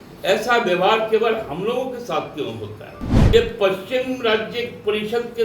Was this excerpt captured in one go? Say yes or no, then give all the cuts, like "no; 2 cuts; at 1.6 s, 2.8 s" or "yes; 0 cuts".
no; 1 cut; at 3.1 s